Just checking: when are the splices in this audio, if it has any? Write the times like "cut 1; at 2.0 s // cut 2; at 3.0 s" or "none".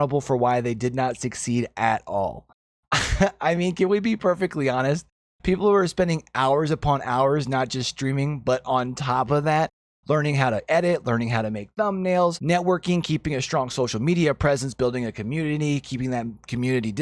none